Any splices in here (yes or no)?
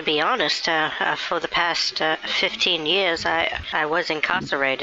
yes